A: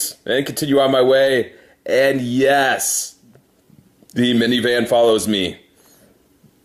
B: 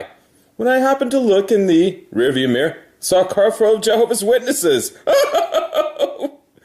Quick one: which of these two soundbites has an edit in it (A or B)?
B